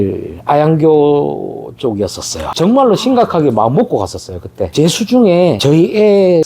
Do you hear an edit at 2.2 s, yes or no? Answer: no